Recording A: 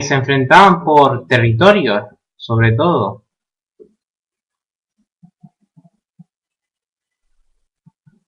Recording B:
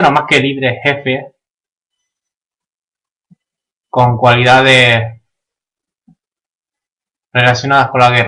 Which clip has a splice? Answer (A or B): A